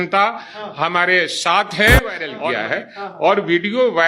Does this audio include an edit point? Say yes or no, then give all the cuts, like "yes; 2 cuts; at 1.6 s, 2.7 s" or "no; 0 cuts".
yes; 1 cut; at 2.3 s